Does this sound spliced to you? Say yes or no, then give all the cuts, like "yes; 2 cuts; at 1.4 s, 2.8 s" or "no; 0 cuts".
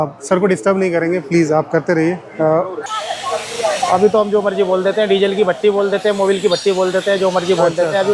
yes; 1 cut; at 2.9 s